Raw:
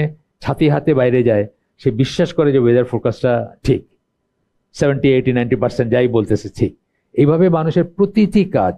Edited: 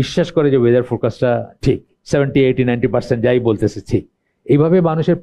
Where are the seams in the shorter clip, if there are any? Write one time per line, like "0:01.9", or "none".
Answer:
0:01.9

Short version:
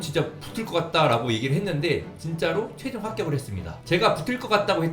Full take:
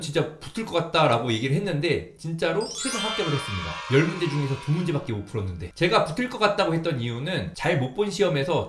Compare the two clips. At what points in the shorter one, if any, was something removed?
0:03.7

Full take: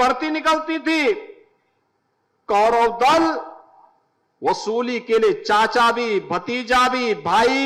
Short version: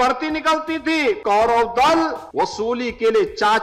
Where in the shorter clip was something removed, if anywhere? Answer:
0:01.2
0:02.2

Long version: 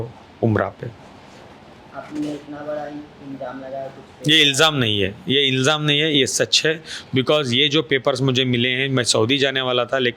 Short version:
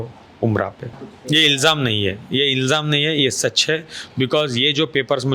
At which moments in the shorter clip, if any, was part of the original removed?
0:01.1

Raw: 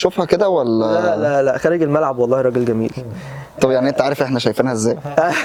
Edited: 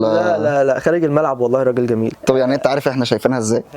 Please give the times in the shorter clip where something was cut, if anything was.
0:02.2

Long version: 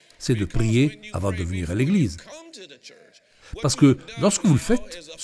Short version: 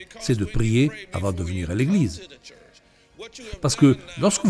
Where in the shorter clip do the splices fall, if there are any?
none

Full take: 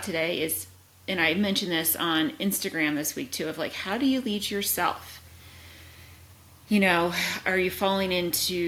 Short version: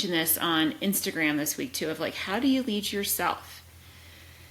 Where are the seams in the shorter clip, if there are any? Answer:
none

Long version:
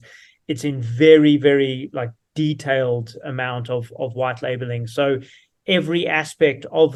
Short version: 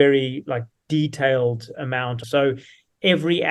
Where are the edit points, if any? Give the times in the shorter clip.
0:02.2

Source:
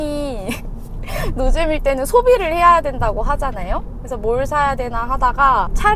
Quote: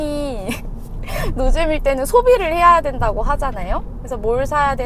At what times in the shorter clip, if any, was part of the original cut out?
none

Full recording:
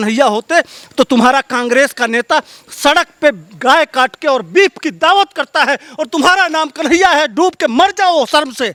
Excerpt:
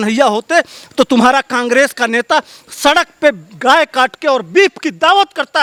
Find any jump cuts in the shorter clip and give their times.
none

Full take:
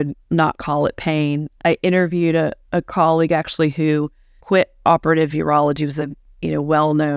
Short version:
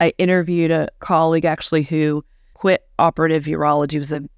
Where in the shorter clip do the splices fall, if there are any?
0:01.0

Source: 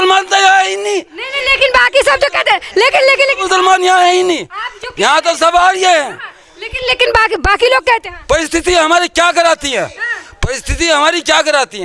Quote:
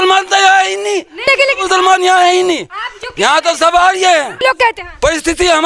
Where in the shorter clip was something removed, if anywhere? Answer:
0:01.3
0:04.4

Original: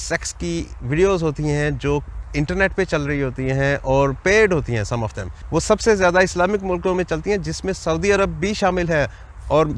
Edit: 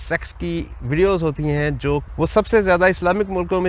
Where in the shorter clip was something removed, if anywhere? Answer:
0:02.1

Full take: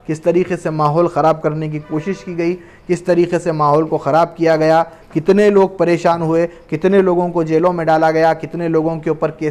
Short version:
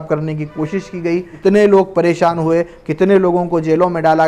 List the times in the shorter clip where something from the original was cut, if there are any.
0:01.3

